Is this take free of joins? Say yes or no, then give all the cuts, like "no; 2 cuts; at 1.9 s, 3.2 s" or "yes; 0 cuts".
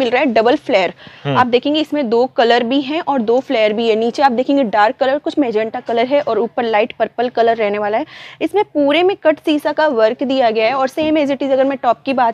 yes; 0 cuts